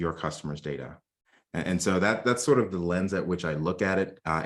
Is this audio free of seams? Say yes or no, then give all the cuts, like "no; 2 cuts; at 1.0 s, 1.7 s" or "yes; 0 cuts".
yes; 0 cuts